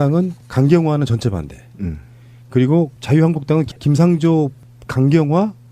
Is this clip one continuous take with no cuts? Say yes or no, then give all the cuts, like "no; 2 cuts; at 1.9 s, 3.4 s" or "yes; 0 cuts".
no; 1 cut; at 0.9 s